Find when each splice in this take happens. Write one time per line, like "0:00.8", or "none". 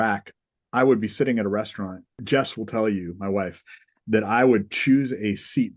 0:02.1